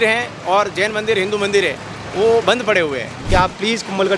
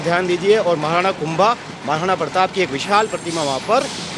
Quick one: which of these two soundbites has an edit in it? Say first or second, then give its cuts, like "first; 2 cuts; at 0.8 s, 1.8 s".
first; 1 cut; at 3.1 s